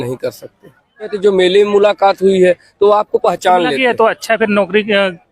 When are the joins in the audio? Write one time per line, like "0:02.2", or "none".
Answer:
0:01.1